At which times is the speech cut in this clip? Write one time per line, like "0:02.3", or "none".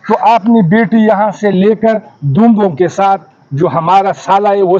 none